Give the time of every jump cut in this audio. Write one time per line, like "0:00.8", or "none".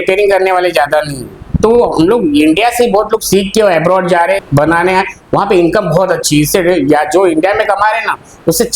0:04.5

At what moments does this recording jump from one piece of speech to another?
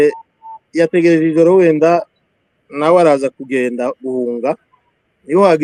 none

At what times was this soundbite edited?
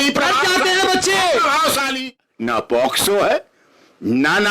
0:02.0

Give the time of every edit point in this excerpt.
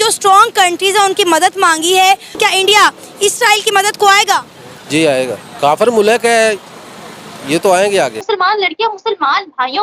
0:02.3
0:05.4
0:08.2

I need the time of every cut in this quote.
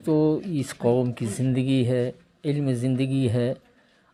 none

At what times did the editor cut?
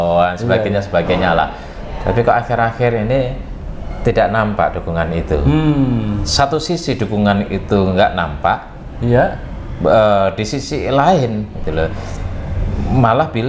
none

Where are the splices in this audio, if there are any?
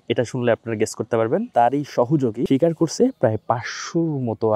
0:01.5
0:02.4

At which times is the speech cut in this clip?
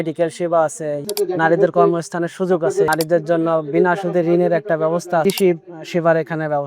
0:01.0
0:02.9
0:05.2

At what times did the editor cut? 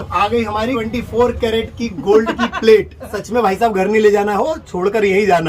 0:03.2

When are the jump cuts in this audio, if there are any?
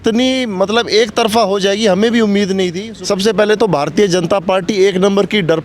0:02.9

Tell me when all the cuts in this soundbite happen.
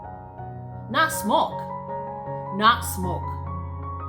0:03.2

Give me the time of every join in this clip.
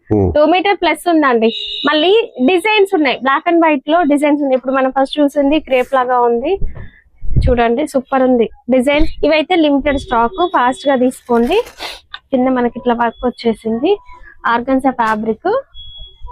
0:09.1

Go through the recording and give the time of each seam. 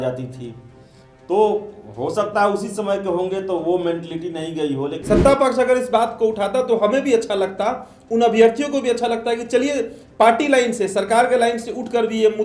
0:05.0

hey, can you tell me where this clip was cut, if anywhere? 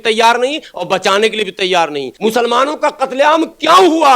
0:02.1

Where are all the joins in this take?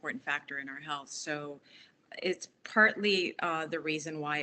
none

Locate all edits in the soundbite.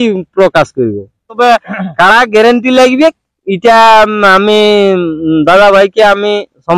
0:01.4

